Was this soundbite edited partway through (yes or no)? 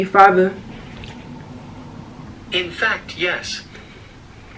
yes